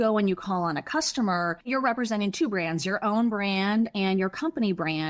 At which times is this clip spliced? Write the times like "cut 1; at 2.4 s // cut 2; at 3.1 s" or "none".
cut 1; at 1.7 s

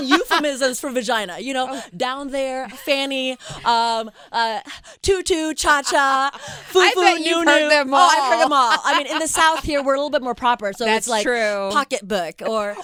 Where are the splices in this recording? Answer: none

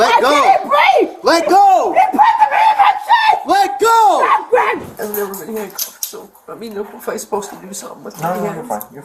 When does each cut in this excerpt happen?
cut 1; at 4.9 s

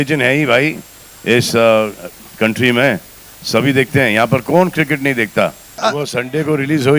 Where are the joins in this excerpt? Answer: cut 1; at 5.8 s

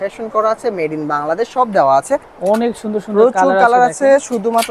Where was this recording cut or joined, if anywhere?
cut 1; at 2.3 s

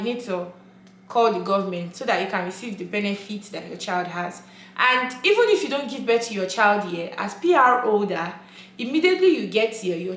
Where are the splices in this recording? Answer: none

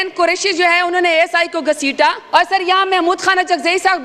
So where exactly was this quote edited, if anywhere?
cut 1; at 2.2 s

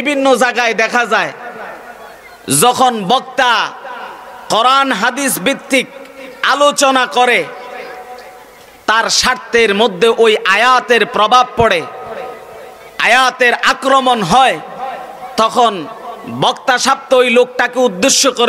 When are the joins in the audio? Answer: none

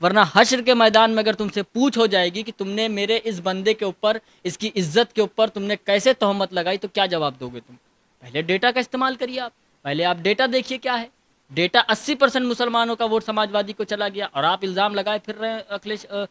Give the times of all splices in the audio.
none

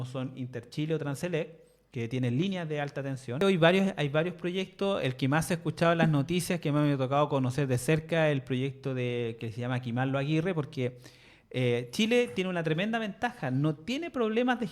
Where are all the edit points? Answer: cut 1; at 3.4 s

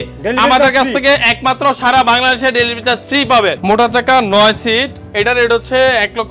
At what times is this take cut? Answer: cut 1; at 3.6 s

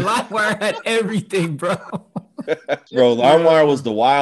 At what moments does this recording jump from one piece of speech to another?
cut 1; at 2.8 s

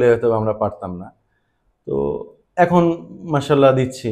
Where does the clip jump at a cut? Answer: none

